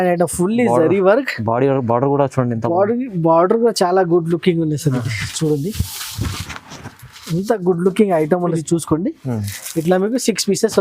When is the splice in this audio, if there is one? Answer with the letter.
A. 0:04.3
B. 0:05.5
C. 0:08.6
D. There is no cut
C